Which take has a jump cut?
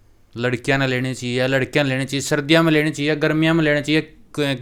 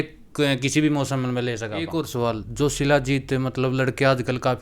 second; 1 cut; at 1.8 s

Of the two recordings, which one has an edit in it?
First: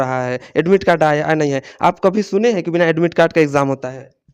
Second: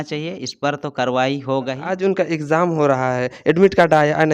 second; 1 cut; at 1.8 s

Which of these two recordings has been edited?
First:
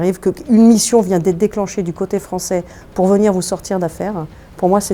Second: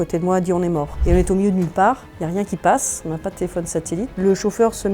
second; 3 cuts; at 0.9 s, 2.1 s, 4.1 s

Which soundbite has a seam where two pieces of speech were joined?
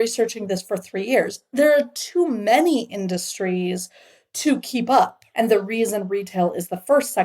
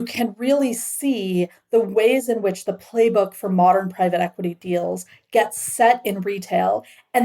first; 1 cut; at 5.2 s

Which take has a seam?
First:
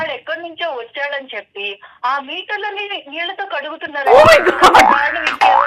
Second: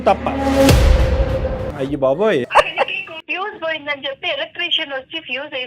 second; 2 cuts; at 1.6 s, 3.2 s

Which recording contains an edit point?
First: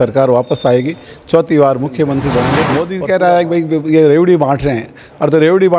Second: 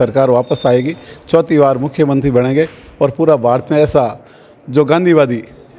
first; 1 cut; at 2.6 s

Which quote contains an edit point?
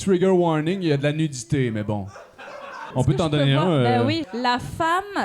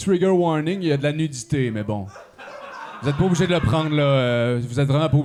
first; 2 cuts; at 2.8 s, 4.3 s

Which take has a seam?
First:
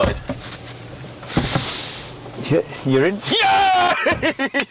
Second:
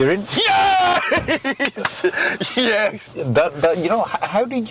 second; 1 cut; at 3.1 s

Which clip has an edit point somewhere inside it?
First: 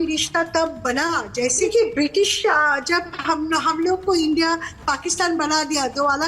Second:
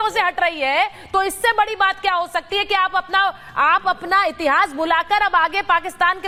first; 1 cut; at 1.7 s

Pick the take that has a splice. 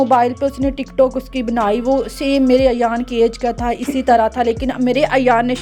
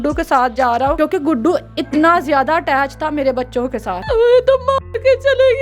second; 2 cuts; at 1.0 s, 4.0 s

